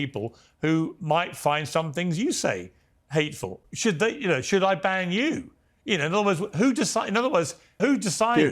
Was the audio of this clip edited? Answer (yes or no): yes